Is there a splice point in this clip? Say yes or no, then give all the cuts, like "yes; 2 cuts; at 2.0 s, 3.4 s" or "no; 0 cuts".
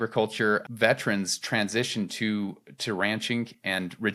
no; 0 cuts